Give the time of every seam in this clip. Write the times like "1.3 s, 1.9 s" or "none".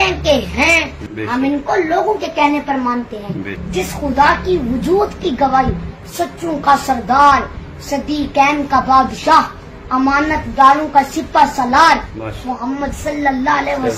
1.0 s, 3.6 s

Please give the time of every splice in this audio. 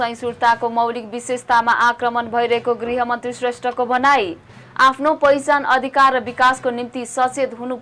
none

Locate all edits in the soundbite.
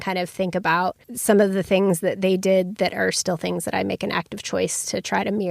1.1 s

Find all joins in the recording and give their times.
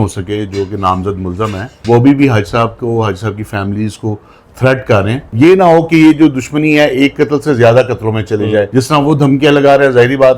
1.7 s, 5.2 s, 8.7 s

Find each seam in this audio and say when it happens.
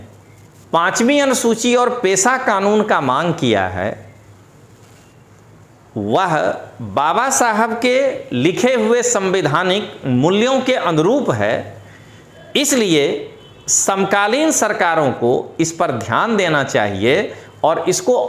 none

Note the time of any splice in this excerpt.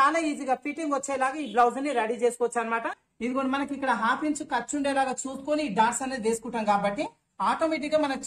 3.0 s

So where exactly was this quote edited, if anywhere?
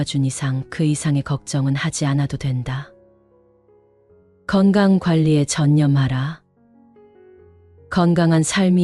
6.5 s, 7.8 s

